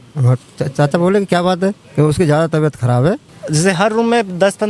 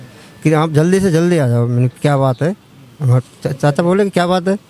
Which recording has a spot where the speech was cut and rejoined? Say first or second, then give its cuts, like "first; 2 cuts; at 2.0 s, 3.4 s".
first; 1 cut; at 3.3 s